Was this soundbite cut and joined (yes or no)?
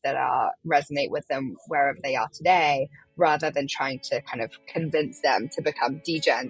yes